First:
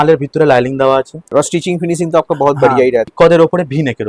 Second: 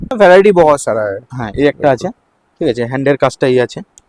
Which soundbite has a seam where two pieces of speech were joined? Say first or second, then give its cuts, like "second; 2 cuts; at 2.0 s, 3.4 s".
first; 2 cuts; at 1.2 s, 3.1 s